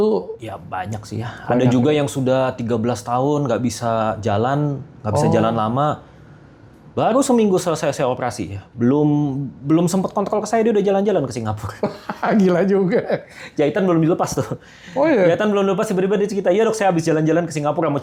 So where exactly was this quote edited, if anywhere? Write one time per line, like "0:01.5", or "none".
none